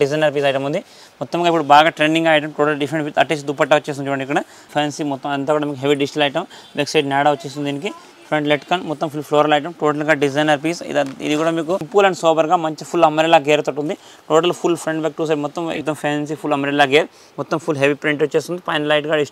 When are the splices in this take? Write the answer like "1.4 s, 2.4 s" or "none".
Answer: 4.7 s, 11.9 s, 15.8 s